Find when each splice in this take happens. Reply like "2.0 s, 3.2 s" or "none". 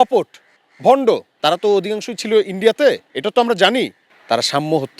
1.3 s, 4.0 s